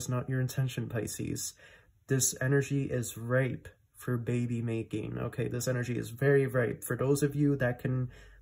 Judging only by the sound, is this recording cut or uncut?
uncut